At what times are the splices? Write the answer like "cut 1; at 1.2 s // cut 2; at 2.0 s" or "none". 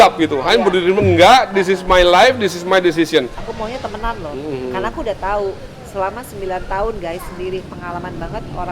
cut 1; at 3.4 s